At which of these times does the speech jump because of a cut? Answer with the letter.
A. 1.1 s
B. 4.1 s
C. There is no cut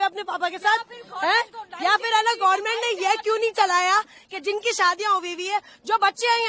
C